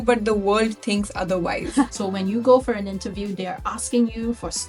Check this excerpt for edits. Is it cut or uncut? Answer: cut